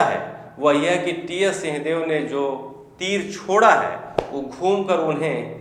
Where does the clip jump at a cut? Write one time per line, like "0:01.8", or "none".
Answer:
none